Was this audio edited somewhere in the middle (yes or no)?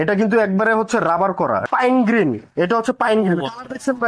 yes